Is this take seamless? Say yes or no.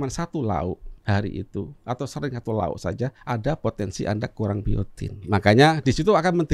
no